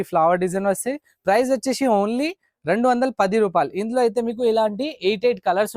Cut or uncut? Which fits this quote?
uncut